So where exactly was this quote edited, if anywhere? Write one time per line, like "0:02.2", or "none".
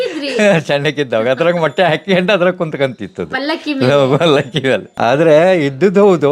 0:04.9